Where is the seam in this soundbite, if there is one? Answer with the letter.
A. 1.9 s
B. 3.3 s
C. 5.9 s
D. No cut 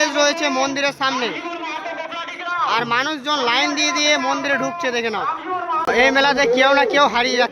C